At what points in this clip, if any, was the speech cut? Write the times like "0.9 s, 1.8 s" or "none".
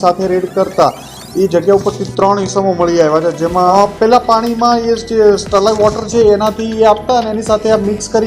3.7 s